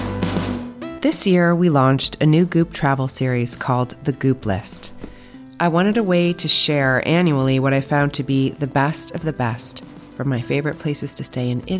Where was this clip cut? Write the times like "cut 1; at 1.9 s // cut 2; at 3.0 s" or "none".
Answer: cut 1; at 0.9 s

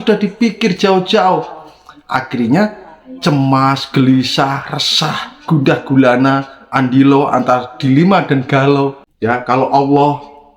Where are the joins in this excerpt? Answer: cut 1; at 9.0 s

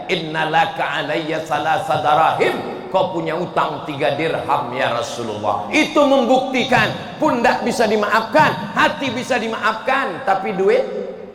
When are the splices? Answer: none

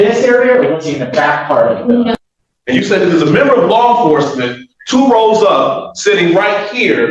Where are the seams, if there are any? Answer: cut 1; at 2.2 s

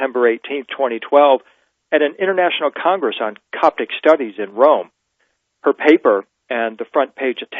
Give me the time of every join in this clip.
cut 1; at 6.4 s

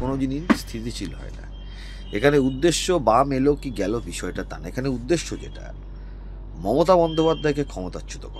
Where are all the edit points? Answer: none

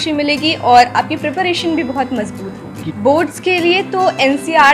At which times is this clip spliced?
cut 1; at 2.8 s

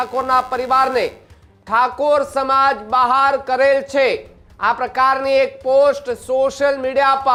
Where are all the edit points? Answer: none

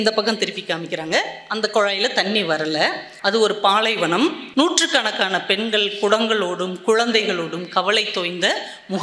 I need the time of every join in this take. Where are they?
cut 1; at 3.1 s // cut 2; at 4.4 s

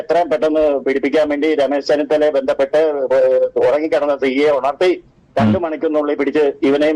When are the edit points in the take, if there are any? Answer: none

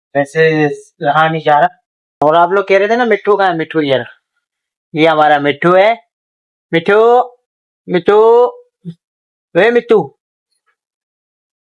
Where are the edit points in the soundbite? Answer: cut 1; at 2.2 s

